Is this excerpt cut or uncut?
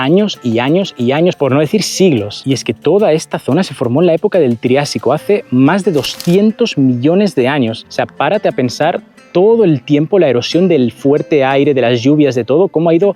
uncut